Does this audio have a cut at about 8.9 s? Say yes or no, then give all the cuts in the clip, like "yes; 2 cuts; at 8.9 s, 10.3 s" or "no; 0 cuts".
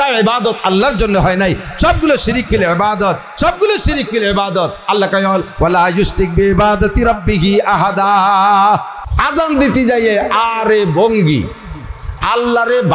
yes; 1 cut; at 8.9 s